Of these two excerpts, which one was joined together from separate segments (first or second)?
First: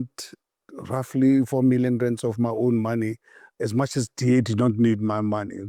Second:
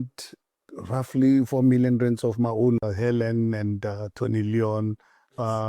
second